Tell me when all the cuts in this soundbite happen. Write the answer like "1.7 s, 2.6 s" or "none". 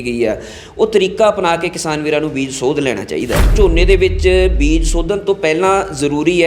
3.5 s